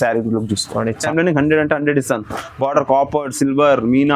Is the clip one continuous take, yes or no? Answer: no